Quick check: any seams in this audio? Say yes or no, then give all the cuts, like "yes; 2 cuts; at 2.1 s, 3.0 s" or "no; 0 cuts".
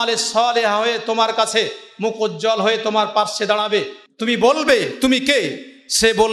no; 0 cuts